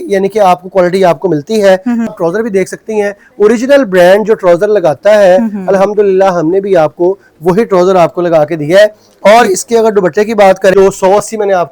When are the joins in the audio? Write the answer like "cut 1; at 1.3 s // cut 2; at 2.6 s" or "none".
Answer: cut 1; at 2.1 s // cut 2; at 10.7 s